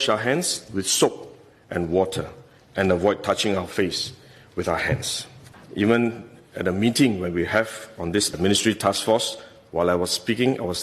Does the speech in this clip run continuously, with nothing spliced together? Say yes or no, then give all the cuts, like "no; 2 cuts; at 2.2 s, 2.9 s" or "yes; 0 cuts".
no; 1 cut; at 5.6 s